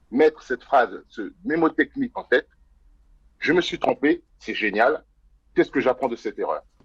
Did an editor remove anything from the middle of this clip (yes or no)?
no